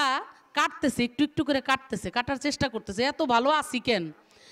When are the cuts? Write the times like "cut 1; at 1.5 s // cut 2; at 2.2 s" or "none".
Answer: none